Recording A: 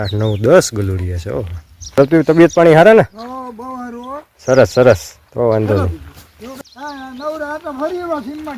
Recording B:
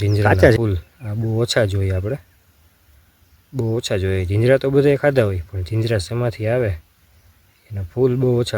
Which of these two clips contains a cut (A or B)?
A